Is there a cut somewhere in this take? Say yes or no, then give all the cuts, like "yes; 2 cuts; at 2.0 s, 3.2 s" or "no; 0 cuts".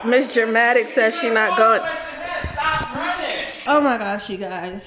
no; 0 cuts